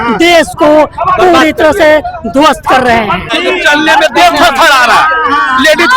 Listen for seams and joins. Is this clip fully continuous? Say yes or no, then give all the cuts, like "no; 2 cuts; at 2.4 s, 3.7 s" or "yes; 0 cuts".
no; 1 cut; at 3.3 s